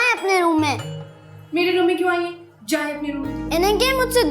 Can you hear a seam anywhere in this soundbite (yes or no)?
yes